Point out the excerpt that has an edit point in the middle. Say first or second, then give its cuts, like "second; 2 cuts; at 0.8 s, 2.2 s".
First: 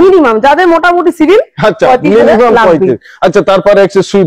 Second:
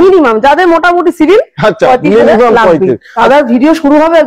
second; 1 cut; at 3.1 s